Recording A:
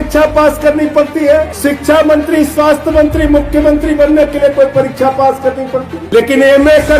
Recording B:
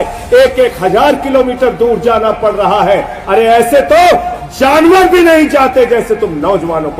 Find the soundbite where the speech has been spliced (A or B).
A